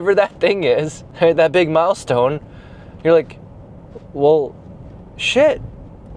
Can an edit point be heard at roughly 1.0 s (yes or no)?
yes